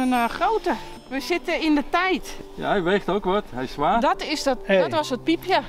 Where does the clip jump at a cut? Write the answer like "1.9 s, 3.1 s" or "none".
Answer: 0.9 s, 2.3 s